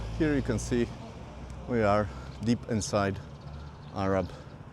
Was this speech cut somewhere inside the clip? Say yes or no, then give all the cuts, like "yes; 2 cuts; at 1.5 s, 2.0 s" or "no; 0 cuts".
no; 0 cuts